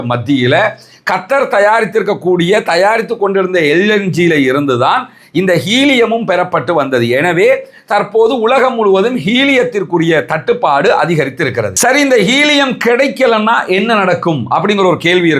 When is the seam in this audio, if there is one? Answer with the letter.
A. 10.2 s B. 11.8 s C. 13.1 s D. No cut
B